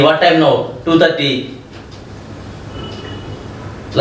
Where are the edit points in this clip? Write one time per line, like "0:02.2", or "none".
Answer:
none